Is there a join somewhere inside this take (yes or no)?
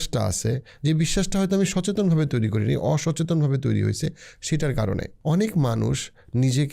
yes